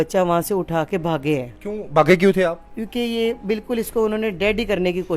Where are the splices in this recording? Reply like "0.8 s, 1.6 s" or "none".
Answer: 1.6 s